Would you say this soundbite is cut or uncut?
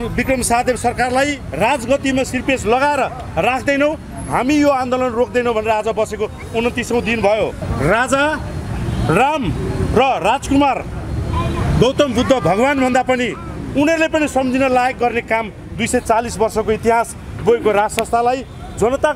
cut